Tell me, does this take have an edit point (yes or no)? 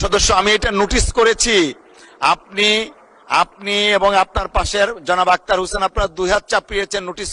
no